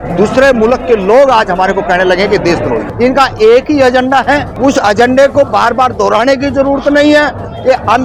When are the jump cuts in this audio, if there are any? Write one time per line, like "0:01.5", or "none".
0:02.9
0:04.5